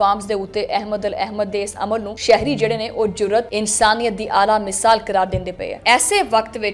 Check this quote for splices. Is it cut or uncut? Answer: cut